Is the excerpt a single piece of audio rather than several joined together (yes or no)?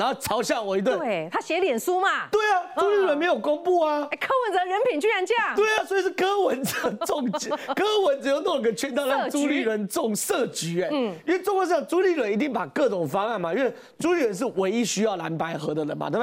yes